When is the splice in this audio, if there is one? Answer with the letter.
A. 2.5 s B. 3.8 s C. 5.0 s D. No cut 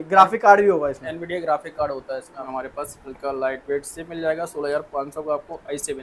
A